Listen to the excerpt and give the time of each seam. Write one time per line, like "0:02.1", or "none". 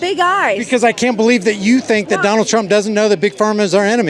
none

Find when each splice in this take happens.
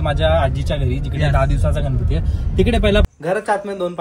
0:03.0

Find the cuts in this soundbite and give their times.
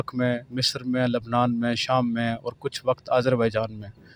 none

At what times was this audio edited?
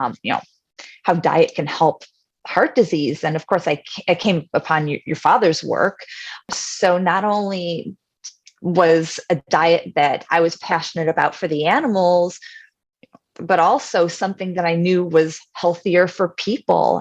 0:06.5

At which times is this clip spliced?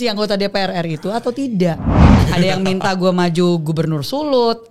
0:02.2

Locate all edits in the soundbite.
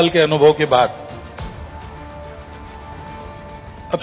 none

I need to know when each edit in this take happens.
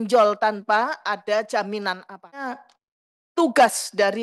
0:02.5

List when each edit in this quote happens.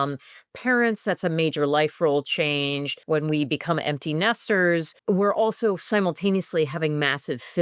0:02.9
0:04.9

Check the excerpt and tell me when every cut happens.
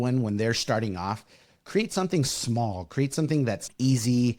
none

